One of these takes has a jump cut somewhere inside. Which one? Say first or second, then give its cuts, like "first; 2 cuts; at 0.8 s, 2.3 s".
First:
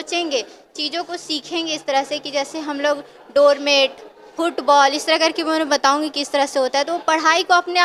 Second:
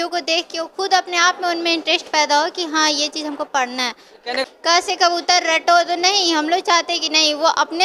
second; 1 cut; at 4.4 s